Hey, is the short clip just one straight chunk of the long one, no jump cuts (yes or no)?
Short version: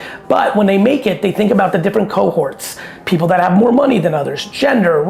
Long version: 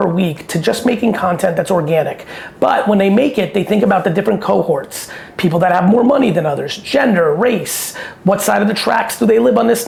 yes